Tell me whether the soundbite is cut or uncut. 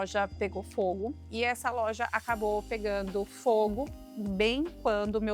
cut